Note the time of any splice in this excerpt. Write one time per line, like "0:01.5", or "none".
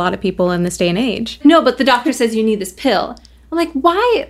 0:01.4